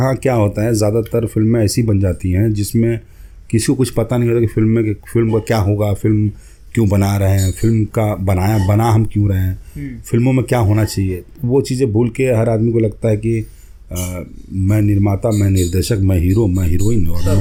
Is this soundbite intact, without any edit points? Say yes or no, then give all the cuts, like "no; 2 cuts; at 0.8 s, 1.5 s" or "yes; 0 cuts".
yes; 0 cuts